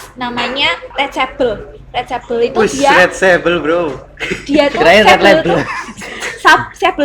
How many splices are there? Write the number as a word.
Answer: one